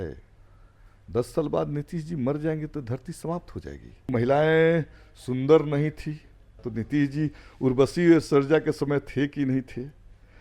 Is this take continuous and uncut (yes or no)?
no